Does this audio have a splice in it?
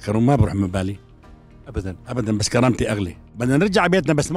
yes; 1 cut; at 3.2 s

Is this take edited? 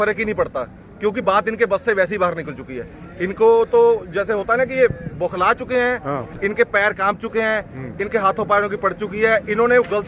no; 0 cuts

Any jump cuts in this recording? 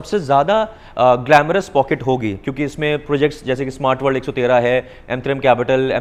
no; 0 cuts

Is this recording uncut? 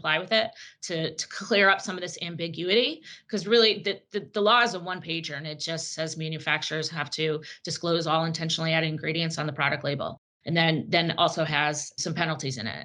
yes; 0 cuts

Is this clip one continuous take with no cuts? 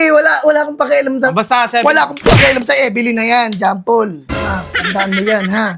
yes; 0 cuts

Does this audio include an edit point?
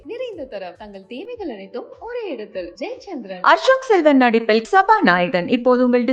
no; 0 cuts

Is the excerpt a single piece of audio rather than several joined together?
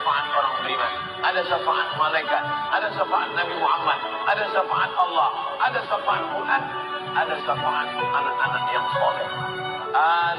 yes; 0 cuts

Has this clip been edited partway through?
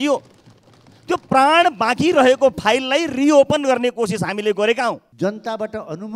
yes; 1 cut; at 5.1 s

